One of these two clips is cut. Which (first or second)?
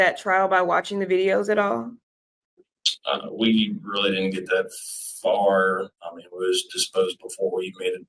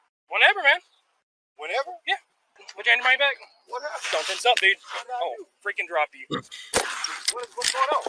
second